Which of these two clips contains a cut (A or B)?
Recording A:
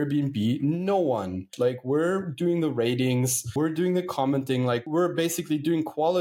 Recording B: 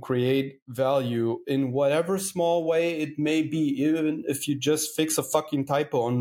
A